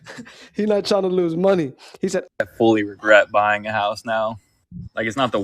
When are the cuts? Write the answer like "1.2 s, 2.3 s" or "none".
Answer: 2.2 s

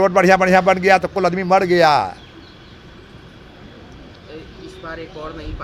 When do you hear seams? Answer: none

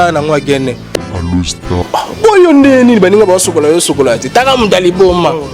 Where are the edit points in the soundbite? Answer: 1.5 s

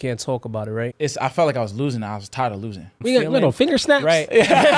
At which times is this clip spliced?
0.9 s, 3.0 s

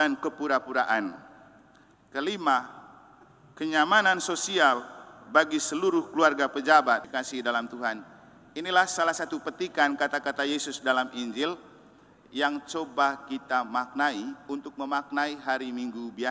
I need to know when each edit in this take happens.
7.1 s

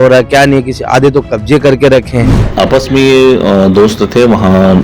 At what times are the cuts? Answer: 2.4 s

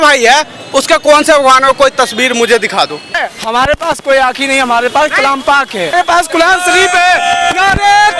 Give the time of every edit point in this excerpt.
3.2 s, 5.9 s

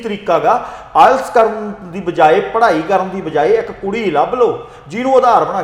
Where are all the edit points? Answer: none

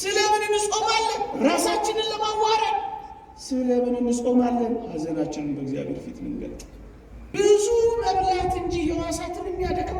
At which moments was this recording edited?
7.4 s

